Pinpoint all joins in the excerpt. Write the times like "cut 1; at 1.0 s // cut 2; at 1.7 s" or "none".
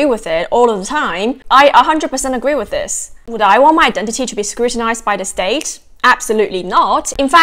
cut 1; at 1.4 s